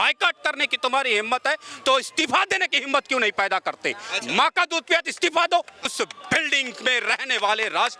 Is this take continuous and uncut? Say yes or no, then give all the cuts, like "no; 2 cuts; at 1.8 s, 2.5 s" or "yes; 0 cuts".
no; 1 cut; at 5.9 s